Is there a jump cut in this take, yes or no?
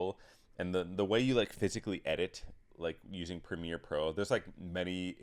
no